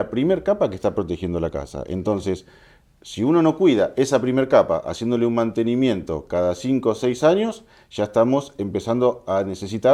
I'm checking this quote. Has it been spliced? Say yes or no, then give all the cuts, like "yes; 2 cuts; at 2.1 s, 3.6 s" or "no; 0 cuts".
no; 0 cuts